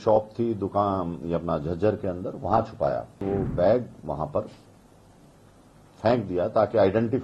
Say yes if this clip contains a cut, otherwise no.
yes